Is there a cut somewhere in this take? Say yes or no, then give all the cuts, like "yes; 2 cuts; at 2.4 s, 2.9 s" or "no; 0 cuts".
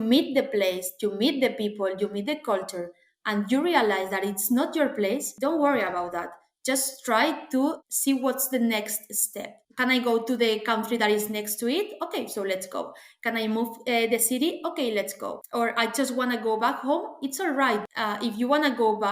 yes; 1 cut; at 18.0 s